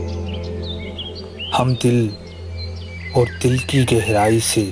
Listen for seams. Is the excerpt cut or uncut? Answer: cut